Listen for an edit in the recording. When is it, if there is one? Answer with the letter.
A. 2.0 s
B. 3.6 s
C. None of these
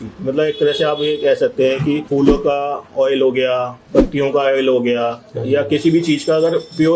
A